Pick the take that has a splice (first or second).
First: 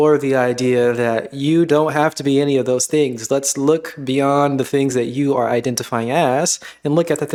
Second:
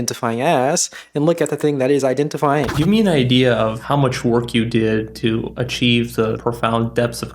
second